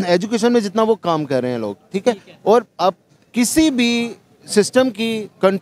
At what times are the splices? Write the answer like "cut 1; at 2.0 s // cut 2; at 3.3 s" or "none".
none